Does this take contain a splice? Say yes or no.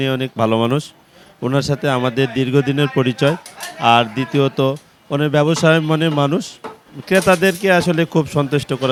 no